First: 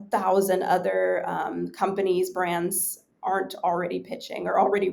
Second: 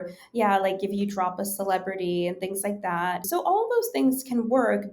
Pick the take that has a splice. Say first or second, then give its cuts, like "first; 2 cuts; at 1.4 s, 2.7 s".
second; 1 cut; at 3.3 s